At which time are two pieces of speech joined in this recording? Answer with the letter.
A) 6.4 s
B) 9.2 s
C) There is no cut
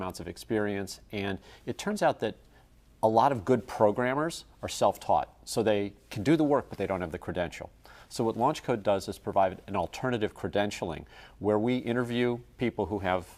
C